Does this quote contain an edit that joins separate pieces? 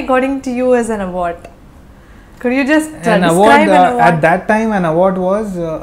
no; 0 cuts

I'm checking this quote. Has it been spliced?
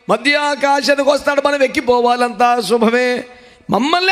no; 0 cuts

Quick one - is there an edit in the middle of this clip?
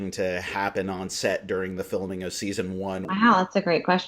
yes; 1 cut; at 3.1 s

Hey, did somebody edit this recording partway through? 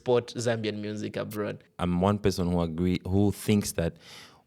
yes; 1 cut; at 1.7 s

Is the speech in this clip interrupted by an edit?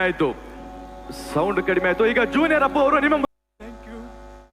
yes; 1 cut; at 3.2 s

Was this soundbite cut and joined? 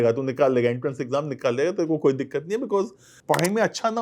yes; 1 cut; at 3.1 s

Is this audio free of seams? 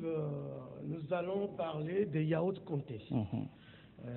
no; 1 cut; at 1.6 s

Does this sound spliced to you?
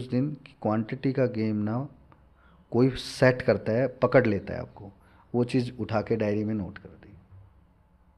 no; 0 cuts

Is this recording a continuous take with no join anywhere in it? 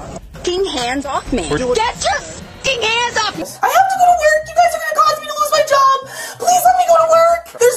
no; 2 cuts; at 1.6 s, 3.5 s

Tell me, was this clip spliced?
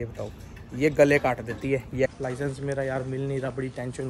yes; 1 cut; at 2.1 s

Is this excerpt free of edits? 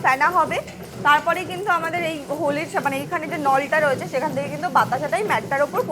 yes; 0 cuts

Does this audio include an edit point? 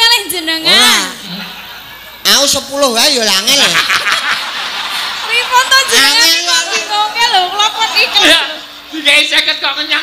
yes; 1 cut; at 1.2 s

